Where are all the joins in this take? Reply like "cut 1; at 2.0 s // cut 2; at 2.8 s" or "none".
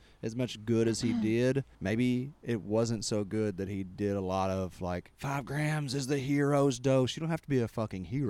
cut 1; at 1.7 s // cut 2; at 5.1 s